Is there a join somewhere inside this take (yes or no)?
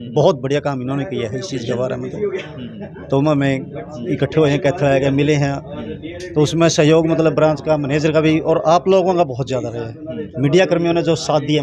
no